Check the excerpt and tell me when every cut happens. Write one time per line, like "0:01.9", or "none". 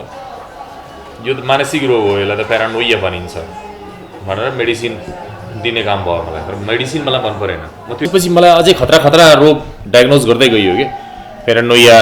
0:08.1